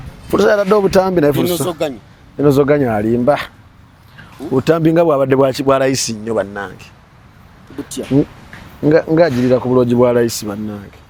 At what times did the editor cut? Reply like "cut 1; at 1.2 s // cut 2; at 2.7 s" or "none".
none